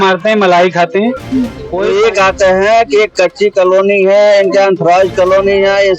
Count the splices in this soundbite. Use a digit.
1